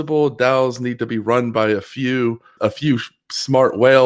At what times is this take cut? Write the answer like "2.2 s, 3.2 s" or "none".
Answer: 2.5 s